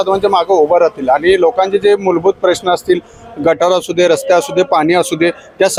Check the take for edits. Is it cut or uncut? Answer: uncut